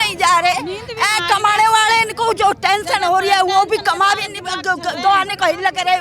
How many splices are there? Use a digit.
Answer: 0